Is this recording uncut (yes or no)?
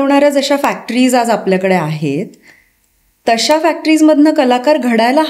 yes